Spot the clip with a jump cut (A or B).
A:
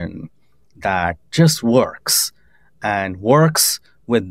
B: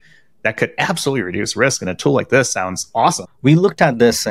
B